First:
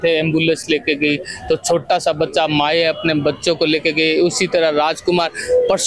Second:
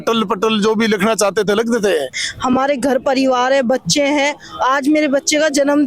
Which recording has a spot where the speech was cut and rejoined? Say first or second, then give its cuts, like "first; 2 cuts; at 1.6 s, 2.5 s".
second; 1 cut; at 2.2 s